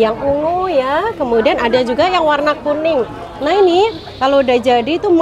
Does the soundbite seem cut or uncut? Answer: uncut